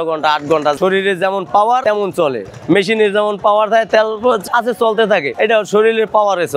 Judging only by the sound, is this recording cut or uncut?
uncut